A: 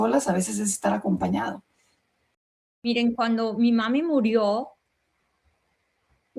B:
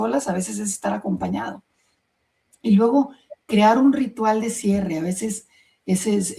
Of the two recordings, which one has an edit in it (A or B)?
A